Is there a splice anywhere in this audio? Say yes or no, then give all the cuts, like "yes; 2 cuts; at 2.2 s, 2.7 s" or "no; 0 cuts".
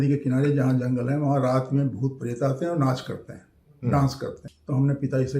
yes; 1 cut; at 4.5 s